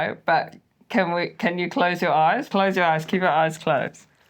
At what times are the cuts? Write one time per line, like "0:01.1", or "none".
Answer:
0:02.5